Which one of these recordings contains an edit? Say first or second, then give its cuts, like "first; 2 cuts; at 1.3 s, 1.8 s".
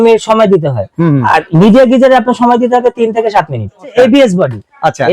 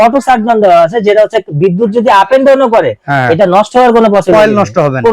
first; 1 cut; at 3.9 s